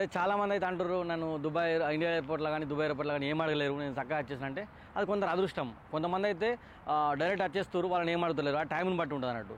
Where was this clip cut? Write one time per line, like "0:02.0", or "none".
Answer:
none